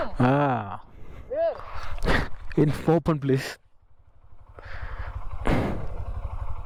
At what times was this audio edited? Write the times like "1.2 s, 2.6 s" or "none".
none